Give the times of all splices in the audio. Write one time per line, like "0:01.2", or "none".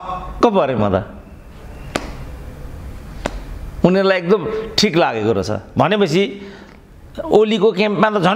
none